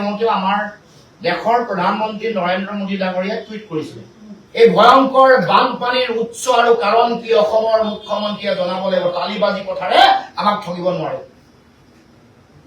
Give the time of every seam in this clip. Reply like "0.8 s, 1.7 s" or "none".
4.5 s